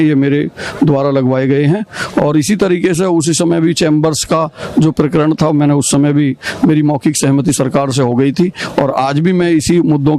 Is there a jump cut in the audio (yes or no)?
no